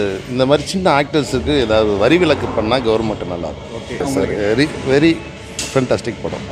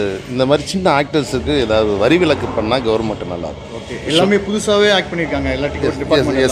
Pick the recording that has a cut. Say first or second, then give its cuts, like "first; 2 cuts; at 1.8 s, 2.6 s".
first; 1 cut; at 4.0 s